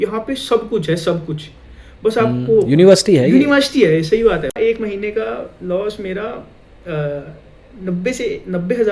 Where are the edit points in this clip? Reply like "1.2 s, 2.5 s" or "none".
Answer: 4.5 s